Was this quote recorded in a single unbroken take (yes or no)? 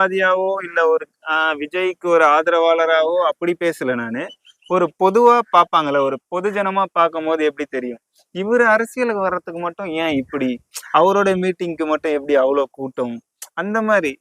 yes